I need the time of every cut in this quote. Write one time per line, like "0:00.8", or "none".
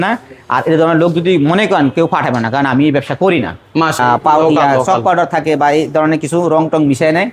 0:04.0